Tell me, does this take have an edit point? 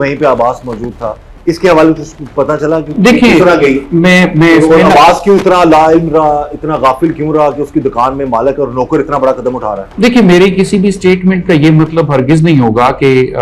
no; 0 cuts

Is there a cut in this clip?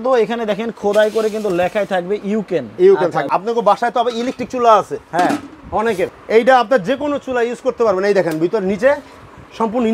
yes; 2 cuts; at 3.3 s, 6.2 s

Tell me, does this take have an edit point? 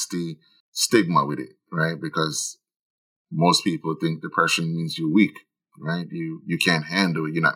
no; 0 cuts

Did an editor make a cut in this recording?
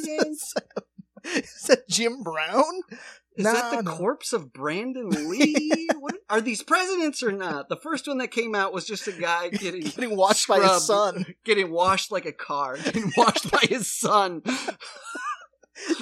no; 0 cuts

